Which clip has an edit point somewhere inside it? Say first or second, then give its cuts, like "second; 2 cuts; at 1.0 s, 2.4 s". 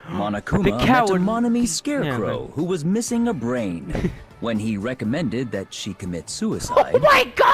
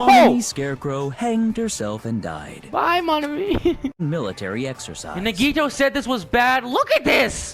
second; 1 cut; at 4.0 s